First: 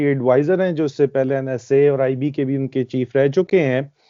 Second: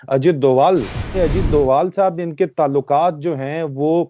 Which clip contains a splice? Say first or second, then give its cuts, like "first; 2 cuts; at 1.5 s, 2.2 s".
second; 1 cut; at 1.0 s